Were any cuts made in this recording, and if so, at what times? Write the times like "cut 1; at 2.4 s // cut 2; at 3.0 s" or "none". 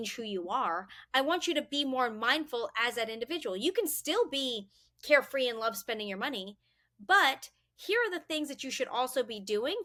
none